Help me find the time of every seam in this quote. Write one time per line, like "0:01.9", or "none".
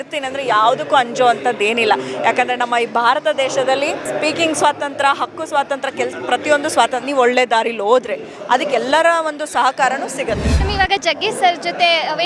none